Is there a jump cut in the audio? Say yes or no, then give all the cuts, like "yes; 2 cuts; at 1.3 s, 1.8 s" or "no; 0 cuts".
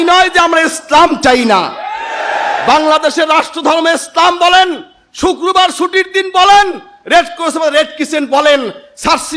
no; 0 cuts